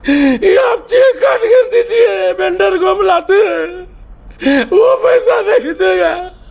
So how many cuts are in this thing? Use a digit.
0